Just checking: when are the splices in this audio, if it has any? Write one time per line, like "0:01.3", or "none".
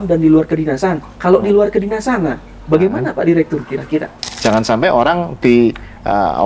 0:04.3